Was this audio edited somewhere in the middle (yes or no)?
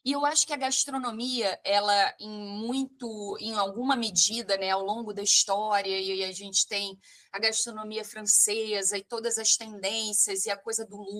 no